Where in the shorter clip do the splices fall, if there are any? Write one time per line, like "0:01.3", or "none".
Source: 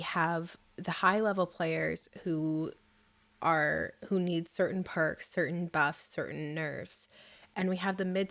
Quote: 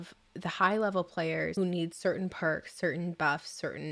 0:01.5